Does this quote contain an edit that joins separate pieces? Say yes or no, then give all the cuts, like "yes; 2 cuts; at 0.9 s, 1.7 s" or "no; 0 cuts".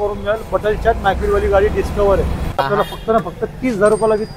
yes; 1 cut; at 2.6 s